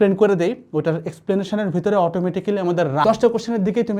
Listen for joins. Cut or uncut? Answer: cut